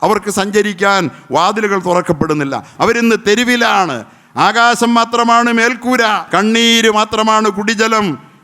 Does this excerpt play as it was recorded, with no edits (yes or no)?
no